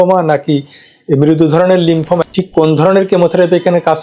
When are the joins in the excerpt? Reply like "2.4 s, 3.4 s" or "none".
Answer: 2.2 s